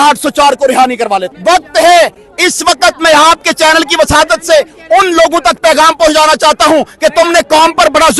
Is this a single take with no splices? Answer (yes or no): no